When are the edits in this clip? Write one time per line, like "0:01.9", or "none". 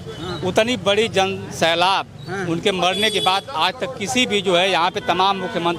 none